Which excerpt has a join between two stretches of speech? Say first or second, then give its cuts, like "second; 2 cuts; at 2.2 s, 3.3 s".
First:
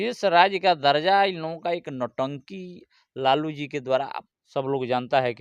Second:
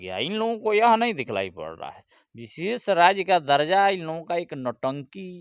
first; 1 cut; at 4.2 s